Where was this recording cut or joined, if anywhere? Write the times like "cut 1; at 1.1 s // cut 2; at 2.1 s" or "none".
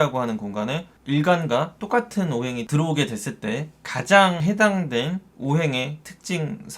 cut 1; at 0.9 s // cut 2; at 4.4 s